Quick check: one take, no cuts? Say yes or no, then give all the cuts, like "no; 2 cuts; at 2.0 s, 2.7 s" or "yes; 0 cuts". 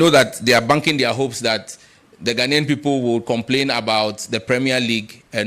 yes; 0 cuts